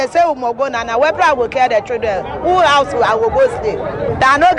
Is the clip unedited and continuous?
yes; 0 cuts

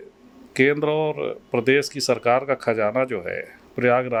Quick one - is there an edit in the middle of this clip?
no; 0 cuts

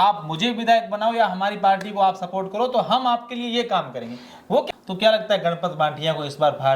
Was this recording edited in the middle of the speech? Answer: yes; 1 cut; at 4.4 s

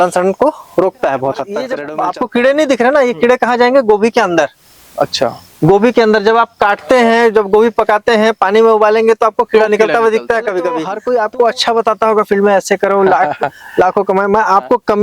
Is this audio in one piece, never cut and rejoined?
no; 2 cuts; at 1.8 s, 10.9 s

